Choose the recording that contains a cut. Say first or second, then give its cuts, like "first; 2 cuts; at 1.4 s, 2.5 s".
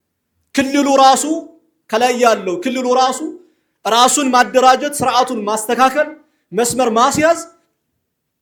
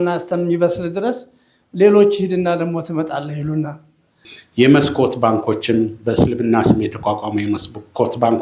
second; 1 cut; at 4.3 s